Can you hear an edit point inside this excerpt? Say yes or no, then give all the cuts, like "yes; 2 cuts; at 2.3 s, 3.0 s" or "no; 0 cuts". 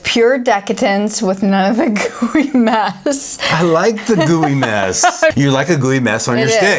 yes; 1 cut; at 5.3 s